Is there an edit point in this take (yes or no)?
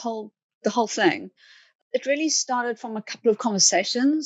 yes